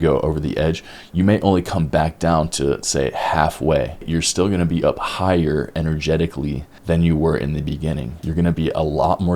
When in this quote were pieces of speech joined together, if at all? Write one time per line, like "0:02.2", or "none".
0:04.1
0:06.7
0:08.1